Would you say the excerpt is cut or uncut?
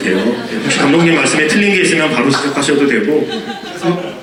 uncut